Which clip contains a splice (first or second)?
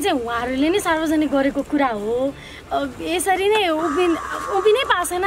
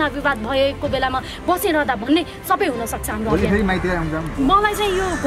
second